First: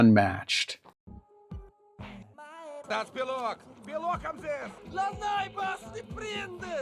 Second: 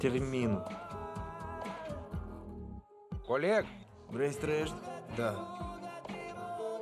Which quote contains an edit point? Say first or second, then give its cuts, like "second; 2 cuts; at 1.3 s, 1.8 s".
first; 1 cut; at 0.9 s